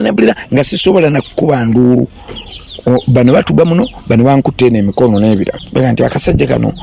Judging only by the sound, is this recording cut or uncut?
cut